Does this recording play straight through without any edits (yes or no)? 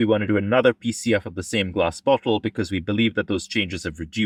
yes